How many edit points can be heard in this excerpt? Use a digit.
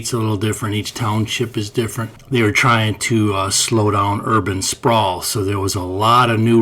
1